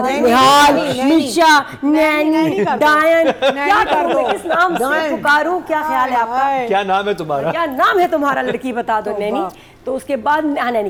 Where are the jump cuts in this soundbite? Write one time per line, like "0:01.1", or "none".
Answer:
none